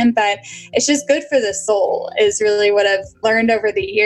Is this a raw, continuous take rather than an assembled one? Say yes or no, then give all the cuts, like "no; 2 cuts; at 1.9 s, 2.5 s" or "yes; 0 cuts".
no; 2 cuts; at 1.6 s, 3.1 s